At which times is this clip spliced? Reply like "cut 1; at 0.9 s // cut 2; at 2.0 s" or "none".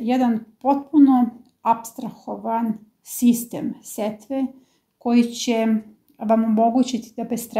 none